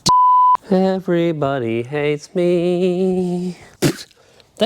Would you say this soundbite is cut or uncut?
cut